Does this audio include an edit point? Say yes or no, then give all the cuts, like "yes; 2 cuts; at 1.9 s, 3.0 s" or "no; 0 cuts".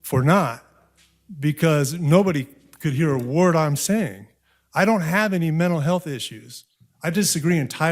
no; 0 cuts